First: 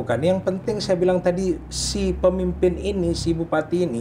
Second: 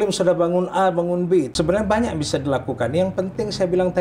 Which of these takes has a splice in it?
second; 1 cut; at 1.5 s

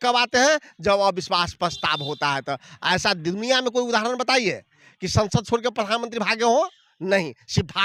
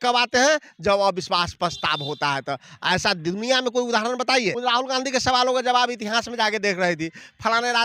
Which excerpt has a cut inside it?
second; 1 cut; at 4.6 s

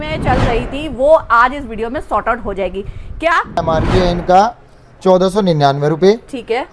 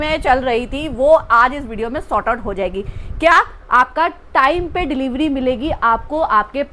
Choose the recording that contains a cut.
first; 1 cut; at 3.6 s

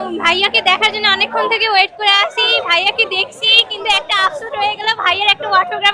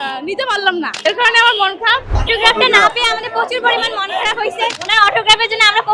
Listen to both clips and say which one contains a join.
second; 3 cuts; at 0.9 s, 2.1 s, 4.8 s

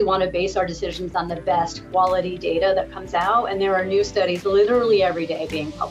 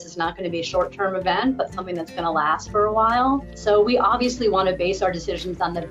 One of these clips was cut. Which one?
second; 1 cut; at 3.5 s

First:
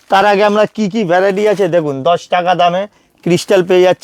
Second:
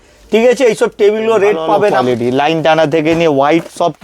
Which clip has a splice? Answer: second; 1 cut; at 2.0 s

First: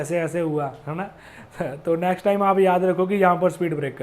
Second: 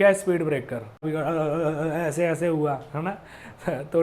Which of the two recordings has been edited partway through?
second; 1 cut; at 1.1 s

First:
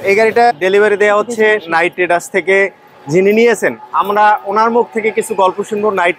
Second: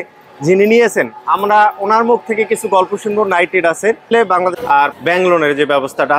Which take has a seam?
second; 1 cut; at 4.6 s

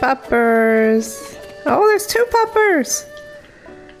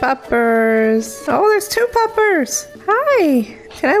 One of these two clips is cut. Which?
second; 2 cuts; at 1.2 s, 2.7 s

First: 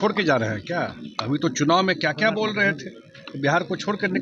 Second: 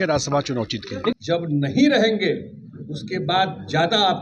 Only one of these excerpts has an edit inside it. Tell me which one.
second; 1 cut; at 1.1 s

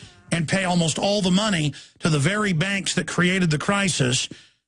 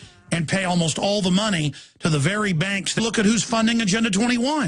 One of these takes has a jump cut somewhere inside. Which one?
first; 1 cut; at 2.9 s

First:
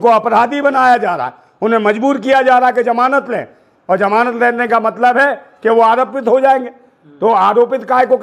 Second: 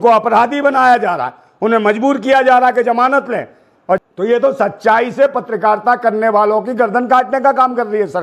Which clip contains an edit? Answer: second; 1 cut; at 4.0 s

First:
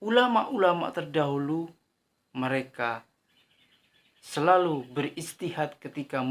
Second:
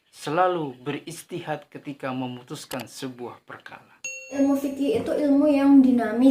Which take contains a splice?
second; 1 cut; at 4.4 s

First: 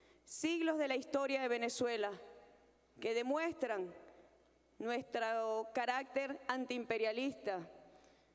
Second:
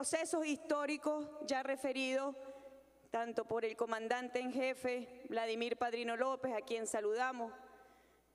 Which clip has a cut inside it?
second; 1 cut; at 7.3 s

